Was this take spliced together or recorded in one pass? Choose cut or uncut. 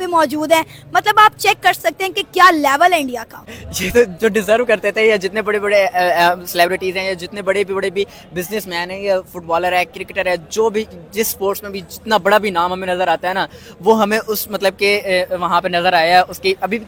uncut